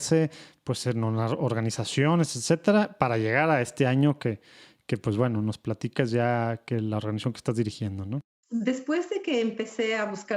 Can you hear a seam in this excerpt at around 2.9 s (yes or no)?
no